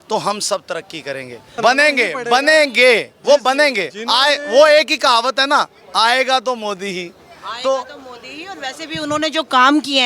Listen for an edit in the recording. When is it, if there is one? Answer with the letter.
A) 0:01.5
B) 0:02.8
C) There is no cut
A